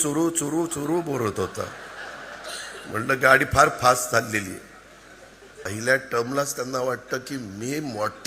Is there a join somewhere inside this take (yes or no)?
yes